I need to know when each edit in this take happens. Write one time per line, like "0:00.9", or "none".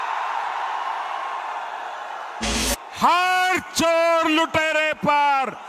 0:02.6